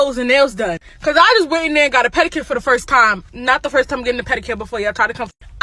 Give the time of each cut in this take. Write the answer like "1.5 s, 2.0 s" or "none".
none